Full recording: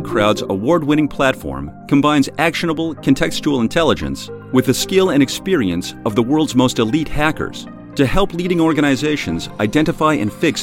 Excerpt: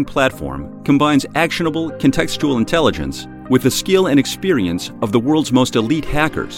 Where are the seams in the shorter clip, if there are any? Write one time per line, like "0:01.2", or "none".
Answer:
none